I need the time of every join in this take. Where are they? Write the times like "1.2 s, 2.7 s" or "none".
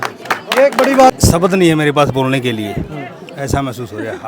1.1 s